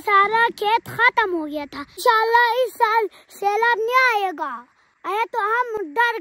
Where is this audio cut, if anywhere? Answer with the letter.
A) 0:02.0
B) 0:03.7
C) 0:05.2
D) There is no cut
A